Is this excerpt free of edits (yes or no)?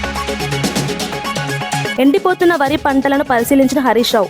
no